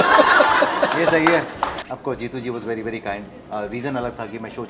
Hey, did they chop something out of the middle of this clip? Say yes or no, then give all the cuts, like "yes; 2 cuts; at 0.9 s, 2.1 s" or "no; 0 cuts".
yes; 1 cut; at 1.8 s